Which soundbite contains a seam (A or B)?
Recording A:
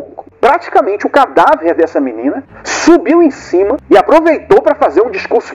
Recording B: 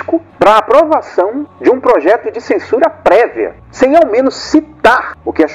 B